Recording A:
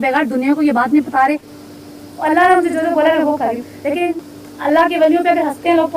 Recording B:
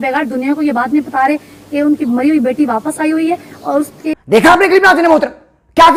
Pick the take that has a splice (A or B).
A